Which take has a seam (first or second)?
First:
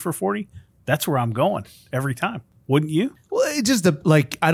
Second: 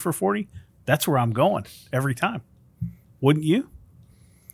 first